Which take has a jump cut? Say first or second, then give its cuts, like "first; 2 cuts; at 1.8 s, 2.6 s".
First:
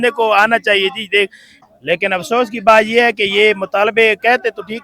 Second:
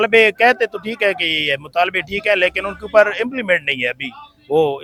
first; 1 cut; at 1.5 s